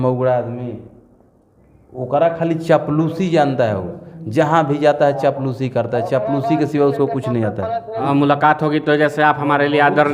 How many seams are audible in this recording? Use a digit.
1